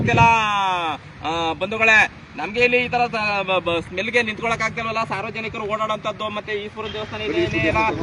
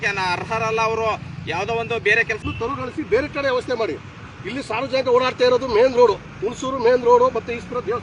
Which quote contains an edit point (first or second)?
second